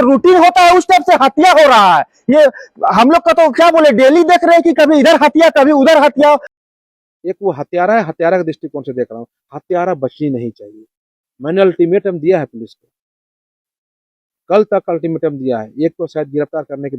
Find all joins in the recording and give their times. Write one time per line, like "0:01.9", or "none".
0:06.5